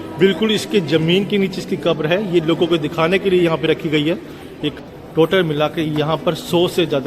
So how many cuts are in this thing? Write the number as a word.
one